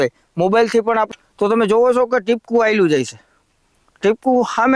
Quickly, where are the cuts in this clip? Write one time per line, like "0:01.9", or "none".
0:01.1

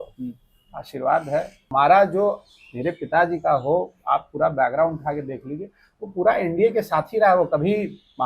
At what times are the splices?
0:01.6

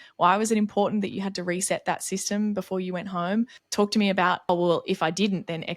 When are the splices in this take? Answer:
0:03.6
0:04.5

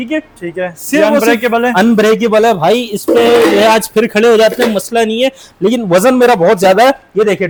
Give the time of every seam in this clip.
none

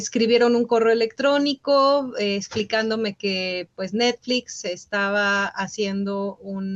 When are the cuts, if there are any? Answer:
none

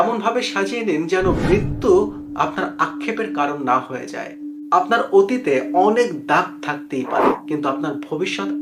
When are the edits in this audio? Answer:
none

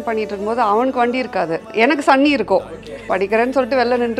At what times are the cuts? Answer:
0:01.6
0:03.1

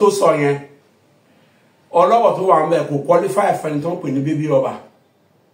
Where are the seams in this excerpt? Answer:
none

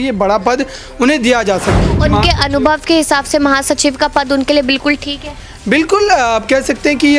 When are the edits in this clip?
0:01.8

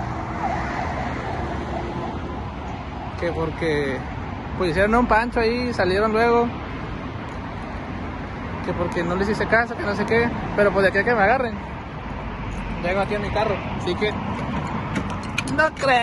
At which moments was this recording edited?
none

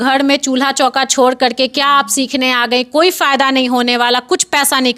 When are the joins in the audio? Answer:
none

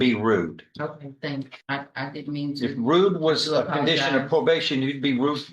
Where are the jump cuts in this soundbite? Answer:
0:01.6

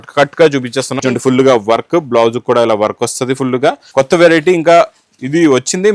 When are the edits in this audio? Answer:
0:00.9
0:03.8

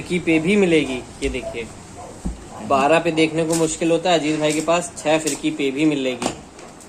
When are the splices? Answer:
none

